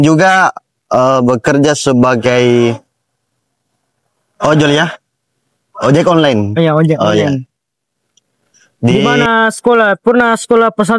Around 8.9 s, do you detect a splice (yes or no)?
yes